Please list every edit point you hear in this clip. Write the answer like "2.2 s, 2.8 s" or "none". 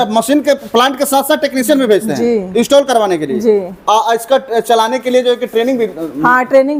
none